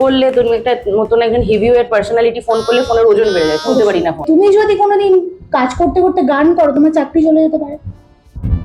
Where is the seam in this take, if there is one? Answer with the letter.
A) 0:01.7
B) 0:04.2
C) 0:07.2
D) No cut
B